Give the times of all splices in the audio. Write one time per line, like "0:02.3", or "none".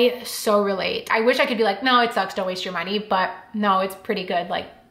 0:01.1